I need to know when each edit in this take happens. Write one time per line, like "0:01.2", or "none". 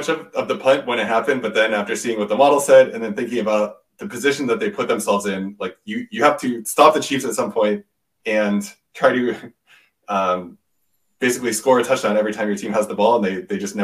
none